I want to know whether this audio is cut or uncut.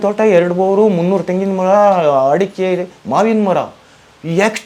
uncut